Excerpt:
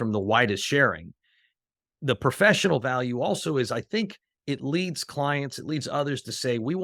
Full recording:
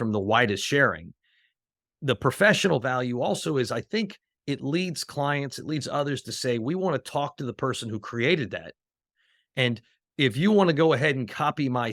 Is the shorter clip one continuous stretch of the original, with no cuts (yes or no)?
yes